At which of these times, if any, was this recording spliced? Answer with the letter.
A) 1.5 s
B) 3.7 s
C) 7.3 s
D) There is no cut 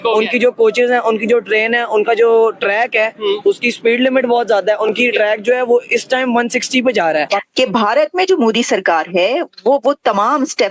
C